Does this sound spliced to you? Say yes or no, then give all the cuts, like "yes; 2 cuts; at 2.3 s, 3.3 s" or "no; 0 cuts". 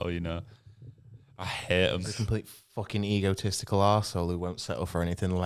yes; 1 cut; at 2.2 s